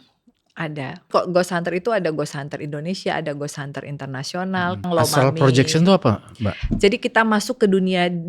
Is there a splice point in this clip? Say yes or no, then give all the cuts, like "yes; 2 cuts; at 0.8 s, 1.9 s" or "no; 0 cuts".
yes; 2 cuts; at 1.1 s, 4.9 s